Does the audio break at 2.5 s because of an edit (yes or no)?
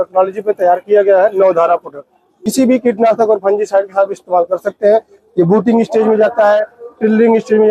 yes